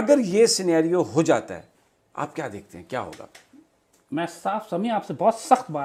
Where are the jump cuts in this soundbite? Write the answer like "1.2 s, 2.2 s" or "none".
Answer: none